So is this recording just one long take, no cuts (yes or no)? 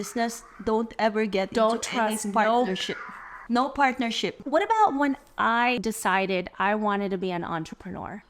no